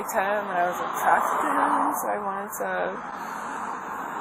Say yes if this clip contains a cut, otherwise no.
no